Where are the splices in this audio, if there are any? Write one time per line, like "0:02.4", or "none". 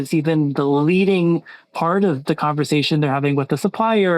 none